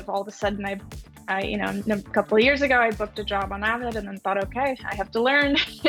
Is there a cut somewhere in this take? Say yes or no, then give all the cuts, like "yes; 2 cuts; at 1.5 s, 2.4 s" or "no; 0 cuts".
no; 0 cuts